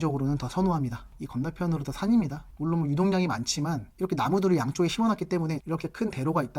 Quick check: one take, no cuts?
no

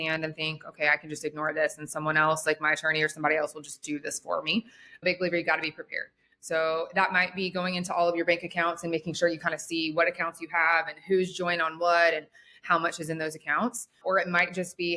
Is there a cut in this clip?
yes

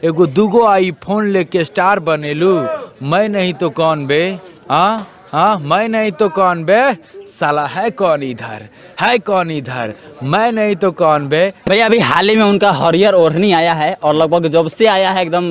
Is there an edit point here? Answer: yes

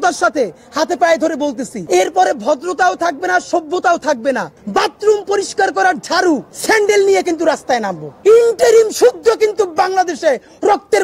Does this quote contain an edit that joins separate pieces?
yes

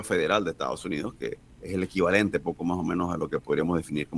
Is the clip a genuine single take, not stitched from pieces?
no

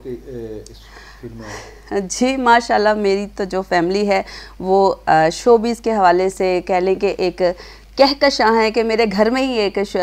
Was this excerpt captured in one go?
yes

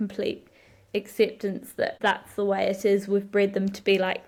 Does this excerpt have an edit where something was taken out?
no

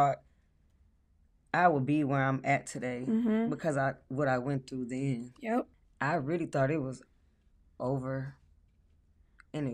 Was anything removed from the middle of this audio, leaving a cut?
yes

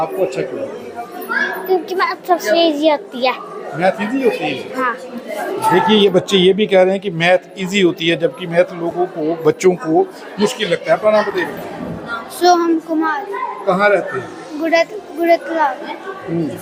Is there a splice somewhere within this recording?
no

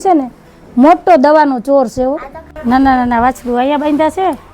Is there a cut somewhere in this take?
yes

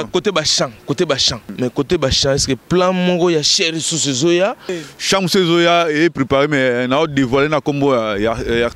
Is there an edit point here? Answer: yes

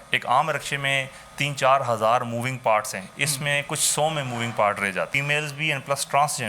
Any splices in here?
yes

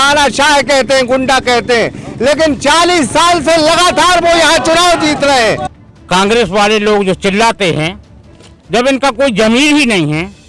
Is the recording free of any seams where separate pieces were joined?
no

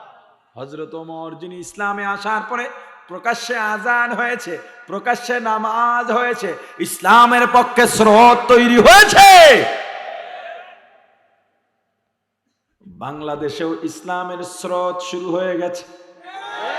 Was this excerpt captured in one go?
yes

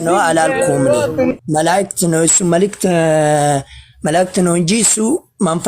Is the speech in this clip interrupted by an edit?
yes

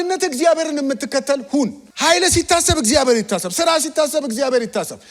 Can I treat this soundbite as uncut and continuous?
no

